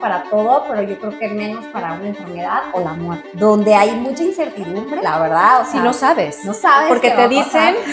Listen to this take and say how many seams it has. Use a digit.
2